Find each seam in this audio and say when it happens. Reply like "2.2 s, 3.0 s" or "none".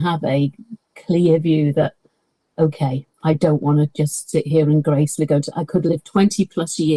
none

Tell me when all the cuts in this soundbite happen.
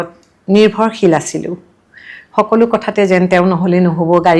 none

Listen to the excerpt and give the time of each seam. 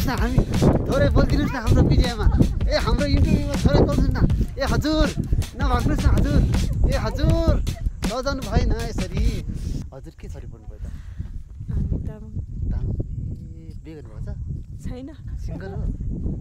9.8 s

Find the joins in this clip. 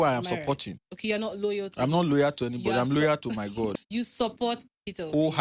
3.7 s

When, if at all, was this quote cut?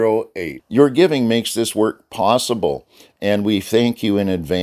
none

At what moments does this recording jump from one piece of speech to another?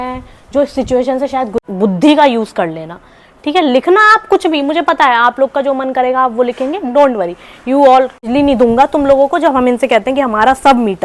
1.6 s, 8.2 s

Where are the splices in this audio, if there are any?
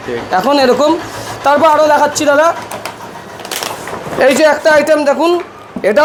none

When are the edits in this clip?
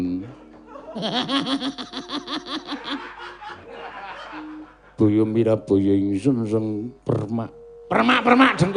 3.6 s

